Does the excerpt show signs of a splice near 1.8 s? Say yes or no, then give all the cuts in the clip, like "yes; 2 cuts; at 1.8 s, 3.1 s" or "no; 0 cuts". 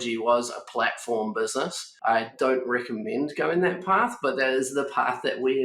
yes; 1 cut; at 1.8 s